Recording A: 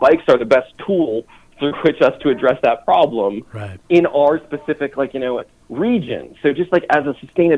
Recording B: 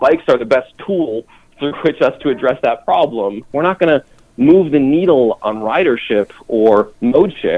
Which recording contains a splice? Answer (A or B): B